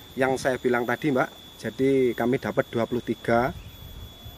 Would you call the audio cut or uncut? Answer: uncut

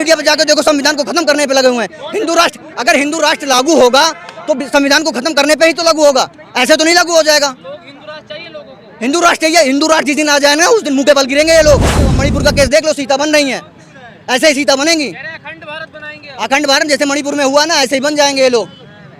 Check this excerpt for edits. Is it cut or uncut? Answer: cut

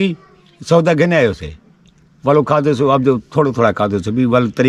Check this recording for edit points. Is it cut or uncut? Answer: uncut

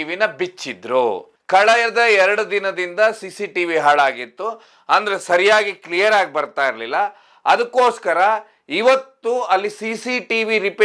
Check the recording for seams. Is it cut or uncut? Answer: cut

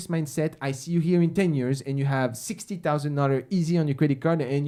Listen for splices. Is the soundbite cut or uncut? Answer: uncut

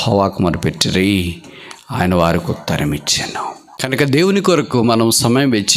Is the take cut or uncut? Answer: cut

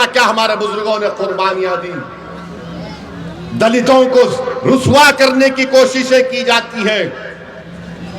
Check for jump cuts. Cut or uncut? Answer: uncut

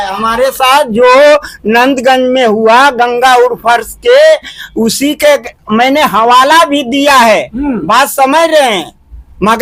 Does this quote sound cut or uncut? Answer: uncut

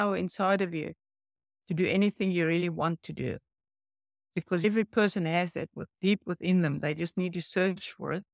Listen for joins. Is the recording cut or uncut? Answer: cut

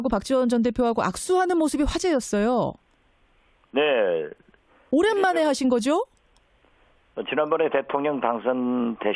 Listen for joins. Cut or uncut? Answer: uncut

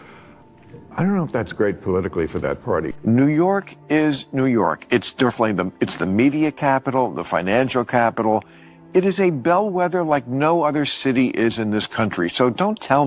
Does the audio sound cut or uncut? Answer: cut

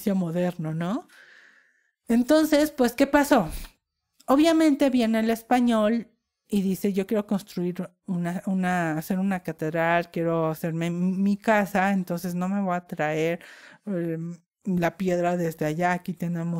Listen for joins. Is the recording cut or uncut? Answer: uncut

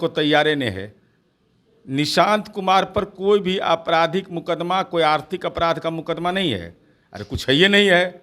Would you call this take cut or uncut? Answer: uncut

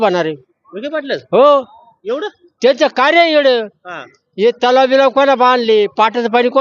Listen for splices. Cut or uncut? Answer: uncut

